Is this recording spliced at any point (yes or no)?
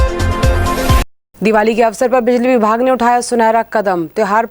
yes